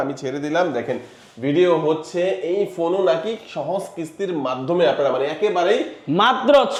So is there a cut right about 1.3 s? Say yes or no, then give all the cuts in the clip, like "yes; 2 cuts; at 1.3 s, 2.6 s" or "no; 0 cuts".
no; 0 cuts